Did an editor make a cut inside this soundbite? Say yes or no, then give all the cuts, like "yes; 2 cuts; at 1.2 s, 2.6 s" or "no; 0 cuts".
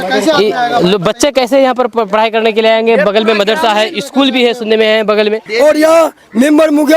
yes; 1 cut; at 5.4 s